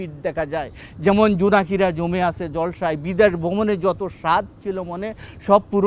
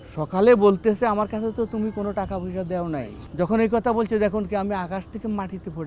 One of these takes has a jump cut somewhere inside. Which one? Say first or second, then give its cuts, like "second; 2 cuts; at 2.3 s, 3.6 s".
second; 1 cut; at 3.2 s